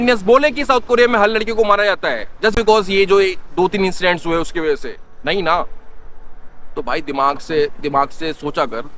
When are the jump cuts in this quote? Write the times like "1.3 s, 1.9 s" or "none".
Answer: none